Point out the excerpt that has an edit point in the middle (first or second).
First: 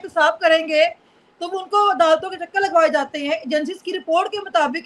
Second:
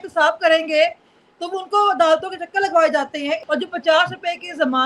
second